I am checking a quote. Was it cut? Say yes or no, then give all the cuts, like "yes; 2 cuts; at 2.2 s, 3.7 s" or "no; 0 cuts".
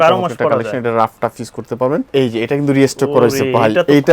yes; 1 cut; at 2.1 s